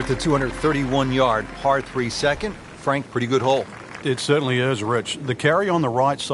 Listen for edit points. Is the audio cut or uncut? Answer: uncut